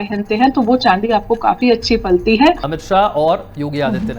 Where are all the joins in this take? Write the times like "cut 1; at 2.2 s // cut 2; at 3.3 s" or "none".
cut 1; at 2.7 s